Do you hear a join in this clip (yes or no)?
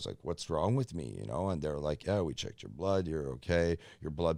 no